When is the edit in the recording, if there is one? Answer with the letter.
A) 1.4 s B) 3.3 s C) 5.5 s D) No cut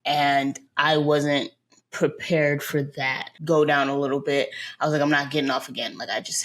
B